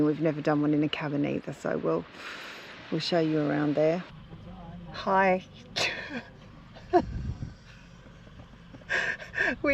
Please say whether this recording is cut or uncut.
cut